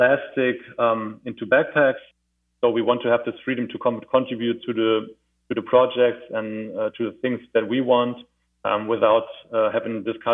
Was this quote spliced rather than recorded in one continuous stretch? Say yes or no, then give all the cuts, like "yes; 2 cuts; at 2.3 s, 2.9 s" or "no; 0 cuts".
yes; 1 cut; at 2.2 s